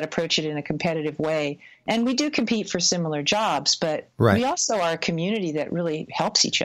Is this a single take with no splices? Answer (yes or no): yes